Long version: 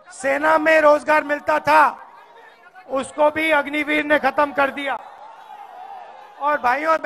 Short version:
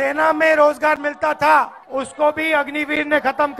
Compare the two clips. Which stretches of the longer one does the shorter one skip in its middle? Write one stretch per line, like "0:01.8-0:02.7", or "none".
0:02.0-0:02.8